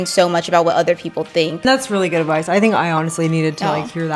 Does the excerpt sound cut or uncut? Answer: cut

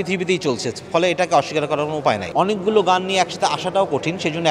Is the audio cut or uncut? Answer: cut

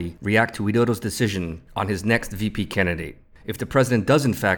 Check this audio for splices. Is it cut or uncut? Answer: uncut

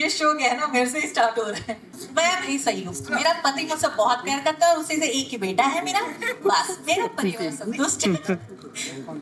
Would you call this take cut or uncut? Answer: cut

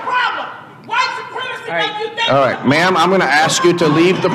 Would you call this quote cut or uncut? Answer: uncut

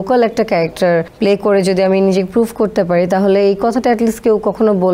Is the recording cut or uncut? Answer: cut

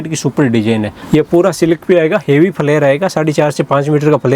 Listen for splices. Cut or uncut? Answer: cut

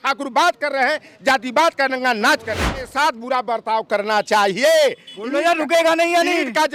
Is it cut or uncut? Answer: cut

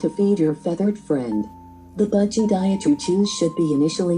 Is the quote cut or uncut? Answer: uncut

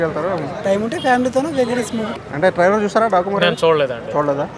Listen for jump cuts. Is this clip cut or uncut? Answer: cut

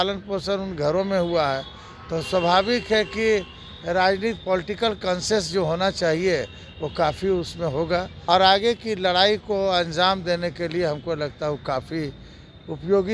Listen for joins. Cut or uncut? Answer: cut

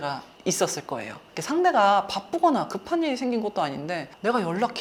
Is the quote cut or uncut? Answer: uncut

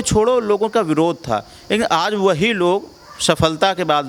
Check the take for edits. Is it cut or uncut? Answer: uncut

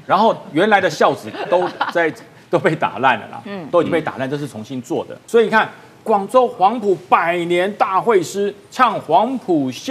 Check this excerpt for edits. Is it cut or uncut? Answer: cut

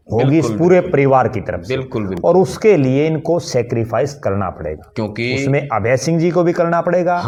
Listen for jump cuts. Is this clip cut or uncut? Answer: uncut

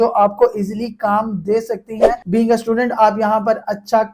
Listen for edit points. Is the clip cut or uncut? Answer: cut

